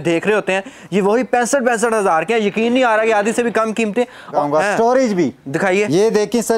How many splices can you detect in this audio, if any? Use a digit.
1